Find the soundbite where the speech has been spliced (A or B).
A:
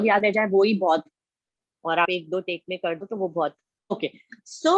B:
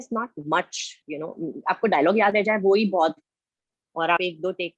A